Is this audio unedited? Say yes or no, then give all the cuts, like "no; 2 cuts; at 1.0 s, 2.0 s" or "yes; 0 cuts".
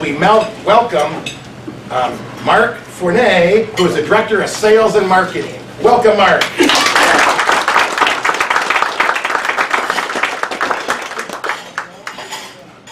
yes; 0 cuts